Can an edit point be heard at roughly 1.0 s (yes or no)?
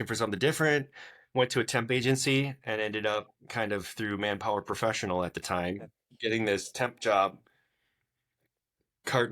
no